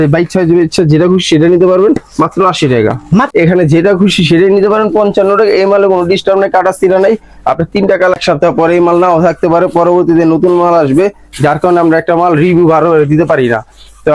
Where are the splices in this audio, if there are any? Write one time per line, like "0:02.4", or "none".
0:03.3
0:08.2